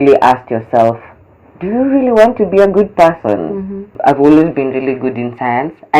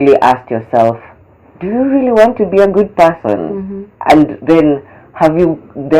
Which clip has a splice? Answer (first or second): first